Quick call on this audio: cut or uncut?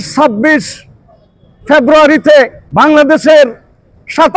cut